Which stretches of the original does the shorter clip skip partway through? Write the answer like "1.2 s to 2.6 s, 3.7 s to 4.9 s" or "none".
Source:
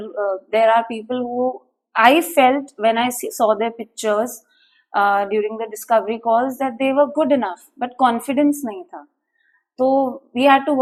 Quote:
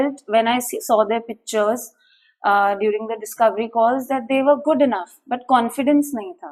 none